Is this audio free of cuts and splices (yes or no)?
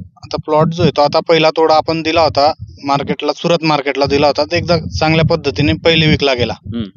yes